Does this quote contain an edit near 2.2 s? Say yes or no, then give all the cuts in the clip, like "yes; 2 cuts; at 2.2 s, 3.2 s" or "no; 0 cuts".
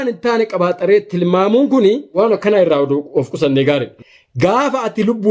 yes; 2 cuts; at 2.2 s, 3.9 s